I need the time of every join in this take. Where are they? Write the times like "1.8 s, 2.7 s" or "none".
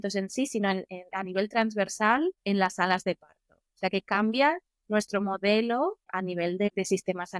none